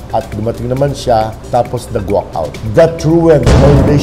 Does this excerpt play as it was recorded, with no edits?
no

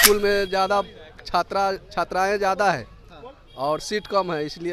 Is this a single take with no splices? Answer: yes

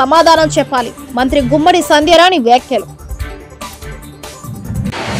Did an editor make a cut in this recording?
no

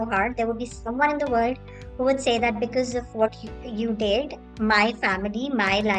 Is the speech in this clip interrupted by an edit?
no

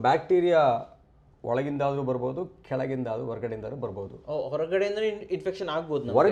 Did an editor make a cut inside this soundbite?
no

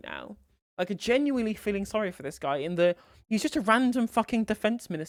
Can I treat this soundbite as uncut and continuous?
yes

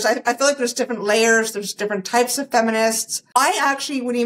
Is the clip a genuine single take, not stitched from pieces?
no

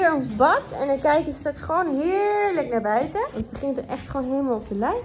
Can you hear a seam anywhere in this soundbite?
yes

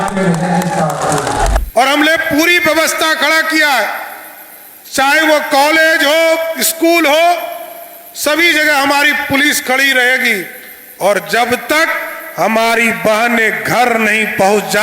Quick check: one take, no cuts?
no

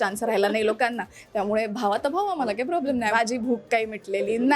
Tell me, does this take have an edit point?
yes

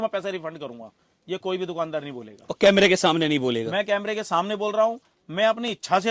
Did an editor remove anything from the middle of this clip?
no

